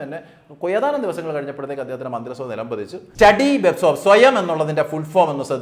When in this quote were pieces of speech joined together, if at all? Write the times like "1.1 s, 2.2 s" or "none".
3.0 s